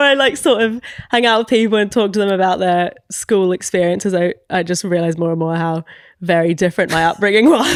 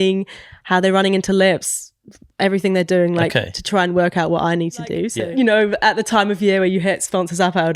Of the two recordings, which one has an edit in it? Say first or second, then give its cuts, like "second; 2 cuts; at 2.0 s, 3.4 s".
second; 1 cut; at 5.1 s